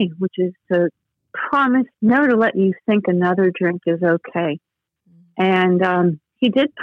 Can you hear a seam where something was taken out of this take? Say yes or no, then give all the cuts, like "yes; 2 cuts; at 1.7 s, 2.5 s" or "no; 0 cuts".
no; 0 cuts